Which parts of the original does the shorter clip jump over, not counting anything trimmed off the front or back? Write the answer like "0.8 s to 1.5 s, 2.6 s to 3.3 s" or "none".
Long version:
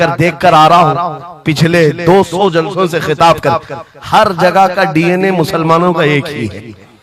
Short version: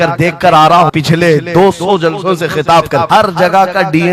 0.9 s to 1.5 s, 3.6 s to 4.1 s